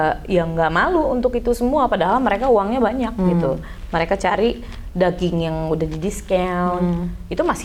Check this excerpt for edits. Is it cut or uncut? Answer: uncut